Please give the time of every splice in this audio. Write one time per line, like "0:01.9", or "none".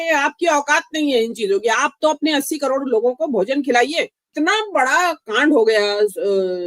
0:04.3